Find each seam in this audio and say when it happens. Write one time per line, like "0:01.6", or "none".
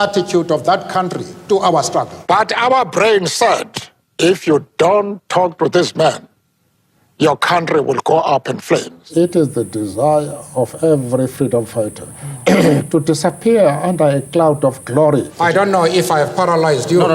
0:02.2
0:09.0
0:15.3